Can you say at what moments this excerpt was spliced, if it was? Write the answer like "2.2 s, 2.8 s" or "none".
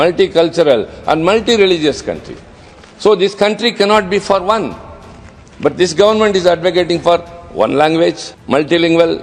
8.3 s